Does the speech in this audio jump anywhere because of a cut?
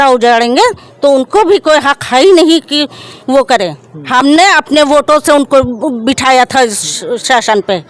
no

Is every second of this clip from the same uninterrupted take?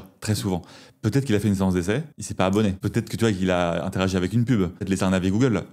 no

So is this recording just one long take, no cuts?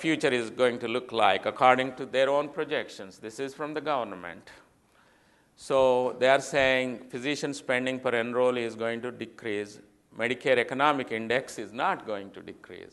yes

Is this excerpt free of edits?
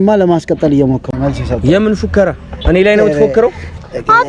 no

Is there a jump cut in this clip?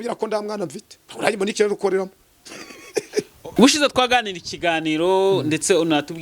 yes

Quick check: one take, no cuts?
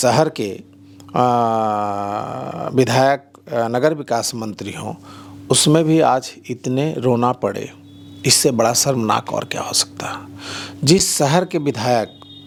yes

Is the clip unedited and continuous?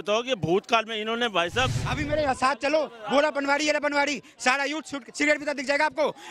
no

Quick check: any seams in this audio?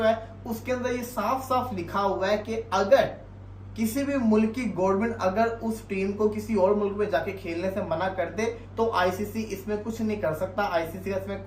no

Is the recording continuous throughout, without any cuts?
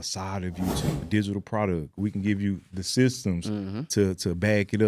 no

